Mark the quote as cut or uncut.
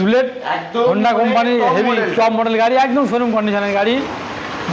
uncut